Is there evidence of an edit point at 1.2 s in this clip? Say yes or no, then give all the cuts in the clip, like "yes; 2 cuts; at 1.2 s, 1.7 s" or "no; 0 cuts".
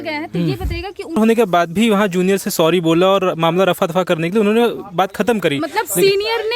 yes; 1 cut; at 1.2 s